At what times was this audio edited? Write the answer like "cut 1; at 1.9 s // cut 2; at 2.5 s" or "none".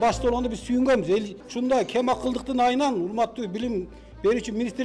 cut 1; at 1.4 s